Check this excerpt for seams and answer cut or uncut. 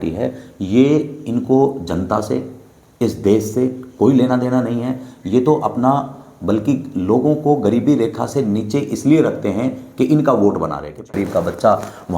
cut